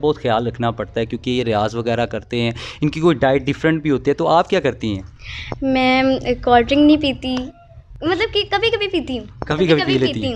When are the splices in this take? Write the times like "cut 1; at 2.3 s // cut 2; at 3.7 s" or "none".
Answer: none